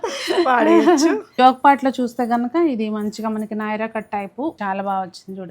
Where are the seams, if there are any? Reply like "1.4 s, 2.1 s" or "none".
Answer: 1.3 s, 4.6 s